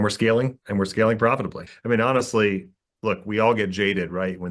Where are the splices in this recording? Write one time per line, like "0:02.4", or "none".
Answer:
0:01.7